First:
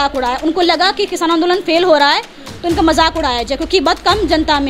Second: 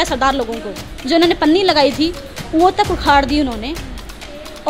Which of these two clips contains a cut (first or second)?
second